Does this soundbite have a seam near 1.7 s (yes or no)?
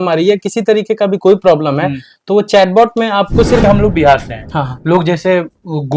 no